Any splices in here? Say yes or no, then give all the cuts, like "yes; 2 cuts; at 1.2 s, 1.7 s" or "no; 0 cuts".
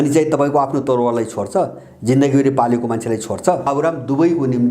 yes; 1 cut; at 3.7 s